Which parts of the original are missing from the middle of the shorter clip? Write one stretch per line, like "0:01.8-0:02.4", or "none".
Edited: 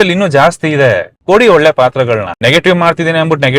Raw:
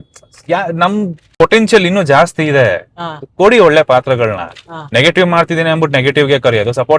0:02.9-0:03.2
0:04.4-0:04.8